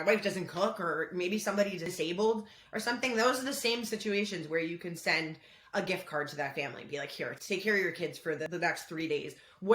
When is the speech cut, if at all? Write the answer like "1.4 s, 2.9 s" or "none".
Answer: 1.8 s, 7.4 s, 8.5 s